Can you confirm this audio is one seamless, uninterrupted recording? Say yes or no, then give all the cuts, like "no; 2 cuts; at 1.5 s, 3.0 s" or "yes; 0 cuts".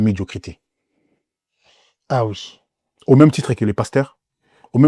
yes; 0 cuts